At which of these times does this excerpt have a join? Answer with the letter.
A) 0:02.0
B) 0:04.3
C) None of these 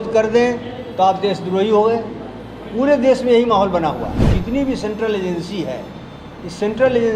B